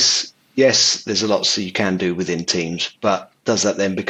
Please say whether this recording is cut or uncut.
uncut